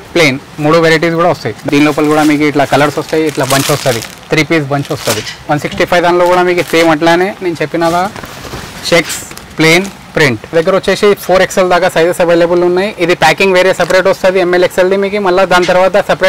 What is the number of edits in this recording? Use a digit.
3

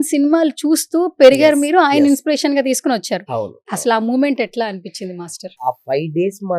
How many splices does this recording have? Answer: 1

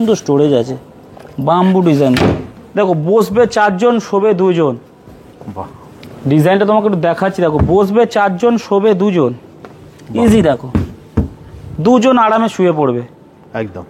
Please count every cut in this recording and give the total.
0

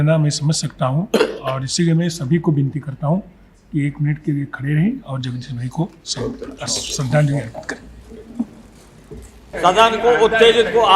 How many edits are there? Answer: 1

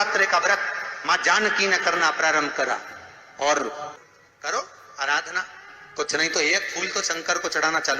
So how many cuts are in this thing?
1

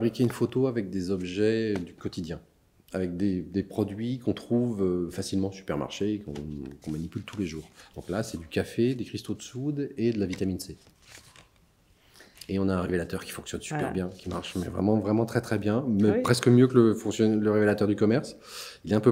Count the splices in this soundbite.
0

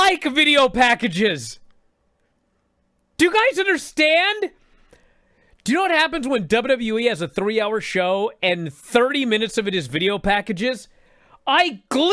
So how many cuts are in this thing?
0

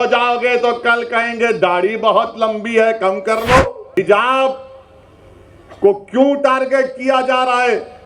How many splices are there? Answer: 1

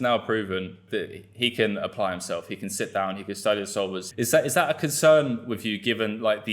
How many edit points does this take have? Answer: 2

